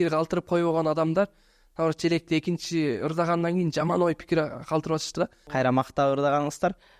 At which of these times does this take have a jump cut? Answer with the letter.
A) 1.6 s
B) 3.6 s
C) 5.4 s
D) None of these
C